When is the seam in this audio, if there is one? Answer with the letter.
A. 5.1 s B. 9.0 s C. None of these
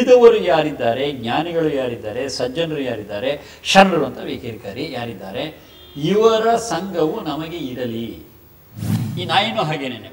B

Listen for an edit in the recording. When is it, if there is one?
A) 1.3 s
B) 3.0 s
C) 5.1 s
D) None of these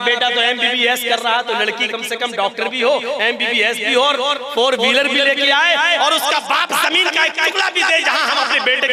D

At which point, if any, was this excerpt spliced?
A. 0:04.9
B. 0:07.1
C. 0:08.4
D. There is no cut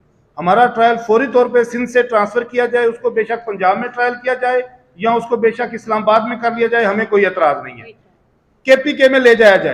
D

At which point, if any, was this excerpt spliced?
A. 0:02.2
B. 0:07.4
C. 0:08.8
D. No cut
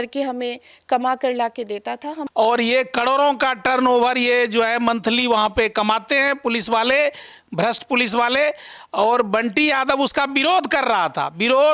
A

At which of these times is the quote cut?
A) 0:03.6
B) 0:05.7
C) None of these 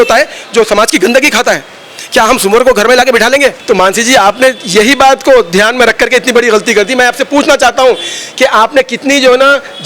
A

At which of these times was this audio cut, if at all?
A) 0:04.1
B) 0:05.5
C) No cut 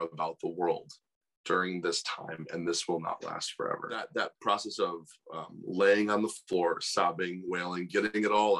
A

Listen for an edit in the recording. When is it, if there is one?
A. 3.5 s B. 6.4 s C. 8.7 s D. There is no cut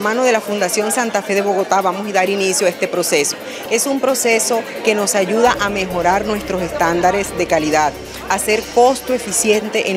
A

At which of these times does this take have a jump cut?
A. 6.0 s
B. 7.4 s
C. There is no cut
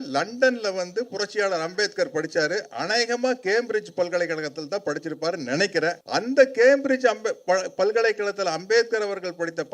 A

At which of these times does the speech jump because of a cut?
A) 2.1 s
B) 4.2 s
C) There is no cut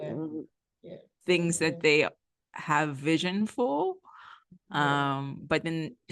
C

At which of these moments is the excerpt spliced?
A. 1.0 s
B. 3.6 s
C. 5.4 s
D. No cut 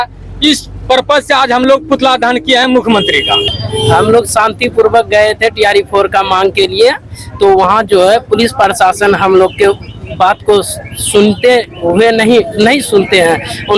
B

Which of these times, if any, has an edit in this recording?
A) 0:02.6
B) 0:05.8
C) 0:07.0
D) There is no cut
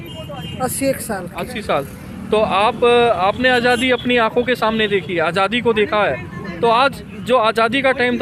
D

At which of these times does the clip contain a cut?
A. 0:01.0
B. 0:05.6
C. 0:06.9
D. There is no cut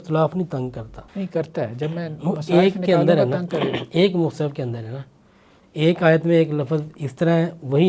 A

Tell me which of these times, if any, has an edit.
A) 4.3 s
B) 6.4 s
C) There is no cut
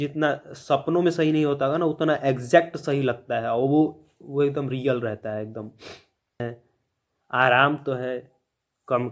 B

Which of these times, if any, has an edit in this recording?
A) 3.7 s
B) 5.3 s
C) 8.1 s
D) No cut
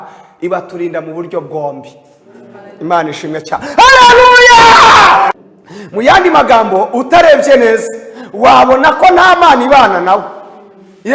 B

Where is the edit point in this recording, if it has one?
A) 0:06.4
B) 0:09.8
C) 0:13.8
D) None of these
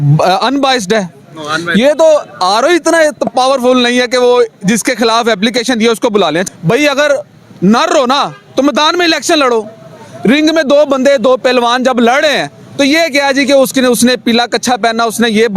A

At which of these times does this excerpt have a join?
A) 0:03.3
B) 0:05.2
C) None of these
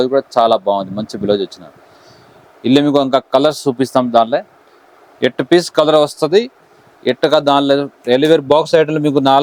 C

